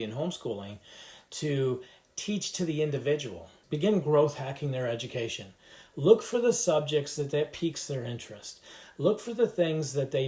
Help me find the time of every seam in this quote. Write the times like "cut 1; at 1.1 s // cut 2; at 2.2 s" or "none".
cut 1; at 3.6 s